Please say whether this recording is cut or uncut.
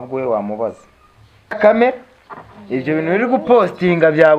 cut